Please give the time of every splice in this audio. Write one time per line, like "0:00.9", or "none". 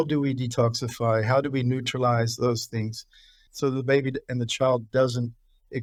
none